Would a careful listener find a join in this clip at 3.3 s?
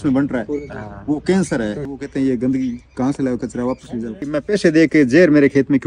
no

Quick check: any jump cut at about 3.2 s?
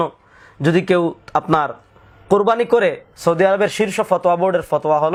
no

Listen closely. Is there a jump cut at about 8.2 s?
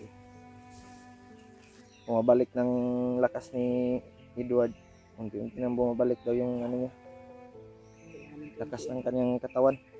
yes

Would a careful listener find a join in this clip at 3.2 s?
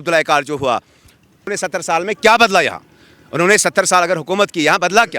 no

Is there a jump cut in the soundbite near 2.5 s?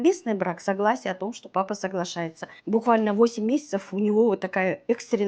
yes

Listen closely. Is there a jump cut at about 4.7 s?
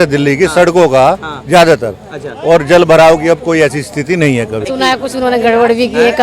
yes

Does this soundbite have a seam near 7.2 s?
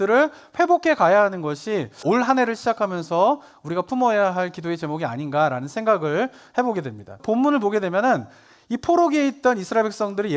yes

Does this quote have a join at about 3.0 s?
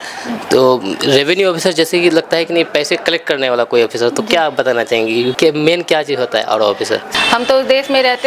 no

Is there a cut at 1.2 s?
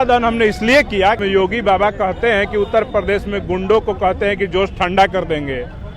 yes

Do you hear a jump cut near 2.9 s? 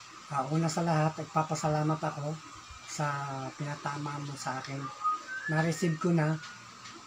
no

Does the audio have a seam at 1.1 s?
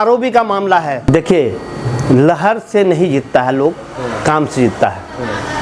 yes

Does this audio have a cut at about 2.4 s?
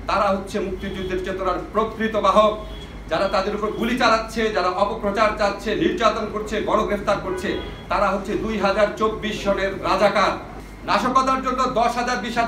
no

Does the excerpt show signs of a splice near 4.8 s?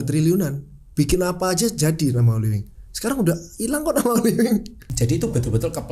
yes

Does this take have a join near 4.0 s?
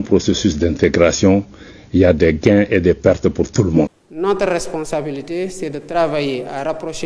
yes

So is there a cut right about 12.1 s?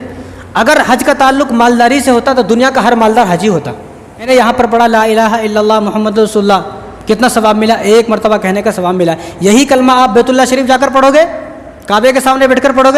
no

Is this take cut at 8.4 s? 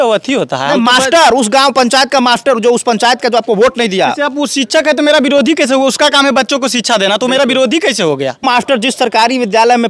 yes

